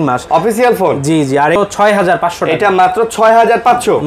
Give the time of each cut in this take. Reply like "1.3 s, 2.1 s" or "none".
1.6 s